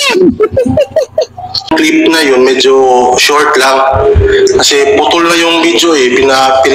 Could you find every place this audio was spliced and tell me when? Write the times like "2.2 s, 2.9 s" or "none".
1.7 s